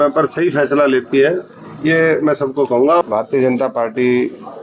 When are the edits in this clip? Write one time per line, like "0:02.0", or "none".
0:03.0